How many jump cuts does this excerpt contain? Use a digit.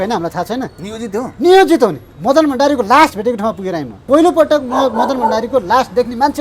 2